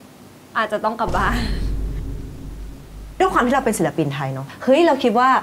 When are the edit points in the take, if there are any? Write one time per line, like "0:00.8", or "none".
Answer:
0:03.2
0:04.4

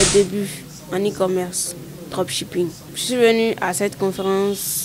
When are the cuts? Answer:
0:02.9

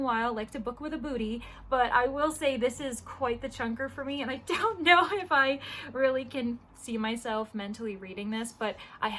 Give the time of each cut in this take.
none

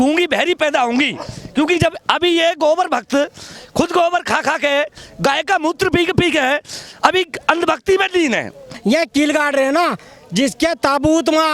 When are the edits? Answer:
0:08.7

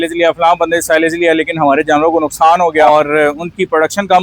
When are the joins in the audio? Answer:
0:02.8

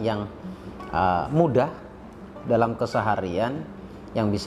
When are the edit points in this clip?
none

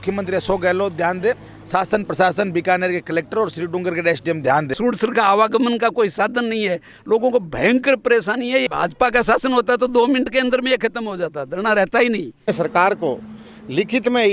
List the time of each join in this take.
0:04.7
0:08.7
0:12.5

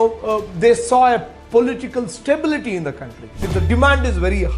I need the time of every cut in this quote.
0:03.4

